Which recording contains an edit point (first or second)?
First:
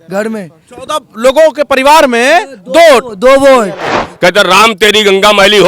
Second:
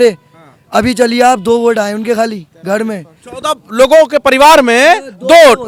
first